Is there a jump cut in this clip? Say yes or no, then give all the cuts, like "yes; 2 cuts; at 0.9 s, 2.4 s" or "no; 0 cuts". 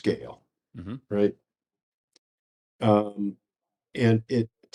no; 0 cuts